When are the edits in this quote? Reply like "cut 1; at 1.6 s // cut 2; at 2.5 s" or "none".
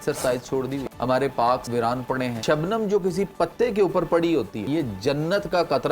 cut 1; at 0.8 s // cut 2; at 1.8 s // cut 3; at 4.6 s